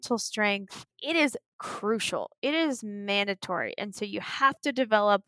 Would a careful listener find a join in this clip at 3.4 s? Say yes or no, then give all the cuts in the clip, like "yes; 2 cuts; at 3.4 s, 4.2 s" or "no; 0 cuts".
no; 1 cut; at 0.9 s